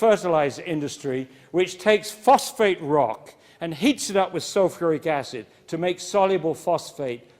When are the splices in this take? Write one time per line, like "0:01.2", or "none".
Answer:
0:01.8